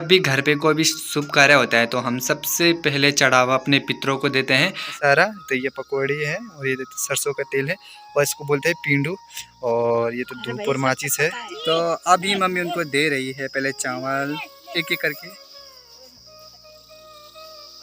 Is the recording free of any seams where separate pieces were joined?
no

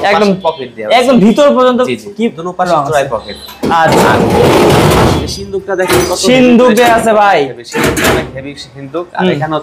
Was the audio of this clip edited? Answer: no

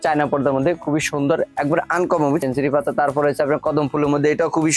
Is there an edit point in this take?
yes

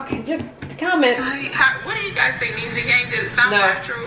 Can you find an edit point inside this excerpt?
yes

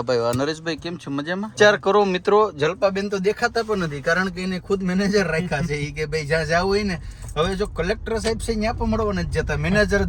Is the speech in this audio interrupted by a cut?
yes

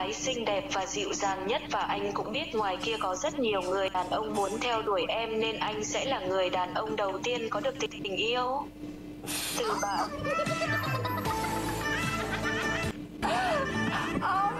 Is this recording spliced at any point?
yes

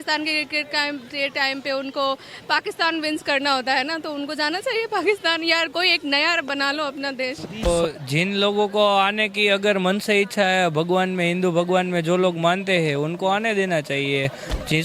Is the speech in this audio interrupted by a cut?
yes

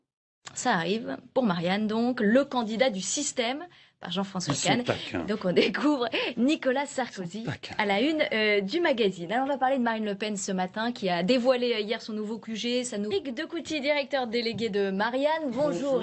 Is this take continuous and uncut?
yes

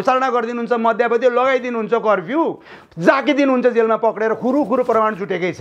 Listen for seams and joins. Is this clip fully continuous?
yes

